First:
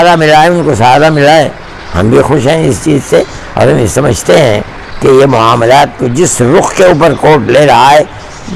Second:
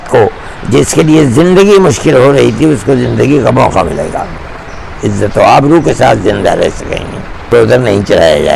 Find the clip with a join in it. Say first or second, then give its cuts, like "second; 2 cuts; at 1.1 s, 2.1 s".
second; 1 cut; at 7.5 s